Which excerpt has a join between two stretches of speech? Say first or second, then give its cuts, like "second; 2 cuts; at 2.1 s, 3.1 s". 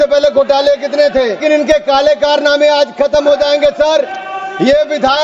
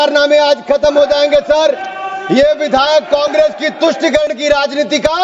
first; 1 cut; at 1.4 s